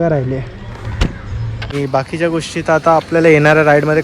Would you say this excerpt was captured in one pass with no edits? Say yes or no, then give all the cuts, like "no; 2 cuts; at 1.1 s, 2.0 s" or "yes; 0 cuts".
no; 1 cut; at 1.7 s